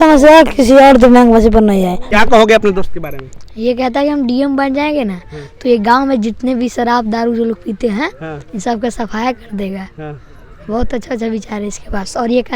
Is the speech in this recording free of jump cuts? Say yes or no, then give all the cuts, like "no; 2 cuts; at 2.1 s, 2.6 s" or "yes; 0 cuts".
no; 1 cut; at 2.2 s